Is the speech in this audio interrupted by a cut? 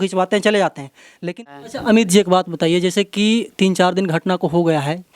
yes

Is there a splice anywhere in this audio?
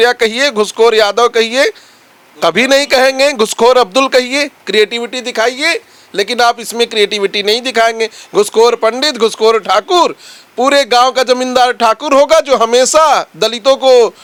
no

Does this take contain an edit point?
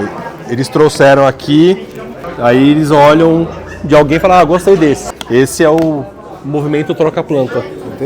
yes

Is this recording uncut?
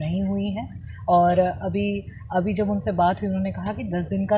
yes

